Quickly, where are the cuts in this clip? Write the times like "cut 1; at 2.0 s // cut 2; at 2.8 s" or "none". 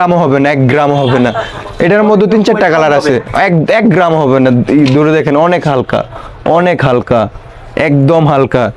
none